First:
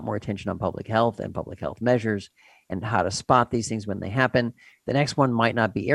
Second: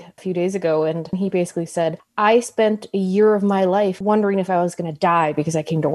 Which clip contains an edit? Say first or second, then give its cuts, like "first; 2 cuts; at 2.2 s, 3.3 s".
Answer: second; 2 cuts; at 1.1 s, 4.0 s